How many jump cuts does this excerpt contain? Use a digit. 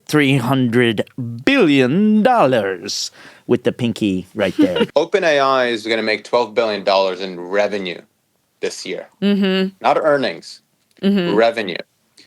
1